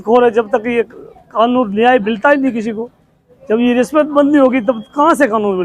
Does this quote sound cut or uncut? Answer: uncut